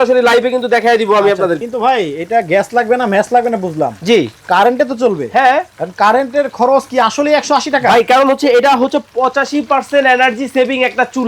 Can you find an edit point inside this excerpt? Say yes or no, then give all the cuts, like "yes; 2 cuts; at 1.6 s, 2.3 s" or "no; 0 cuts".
yes; 1 cut; at 1.6 s